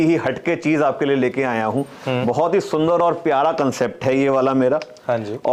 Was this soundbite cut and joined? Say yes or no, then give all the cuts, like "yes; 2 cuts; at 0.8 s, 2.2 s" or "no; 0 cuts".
no; 0 cuts